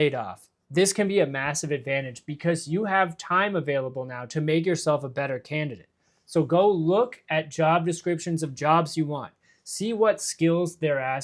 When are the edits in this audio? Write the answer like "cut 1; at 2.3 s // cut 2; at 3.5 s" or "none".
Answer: none